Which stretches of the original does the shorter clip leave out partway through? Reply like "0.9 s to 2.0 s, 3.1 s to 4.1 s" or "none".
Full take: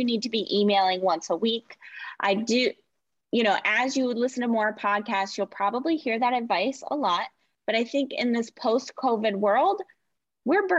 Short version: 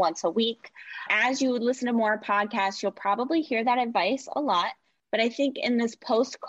2.2 s to 3.6 s